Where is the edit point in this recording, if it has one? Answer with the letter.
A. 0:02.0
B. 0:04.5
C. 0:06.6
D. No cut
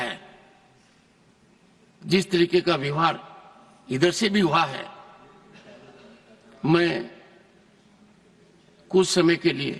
D